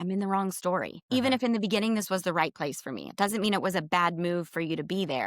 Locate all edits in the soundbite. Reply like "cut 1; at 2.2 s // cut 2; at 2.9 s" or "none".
cut 1; at 0.9 s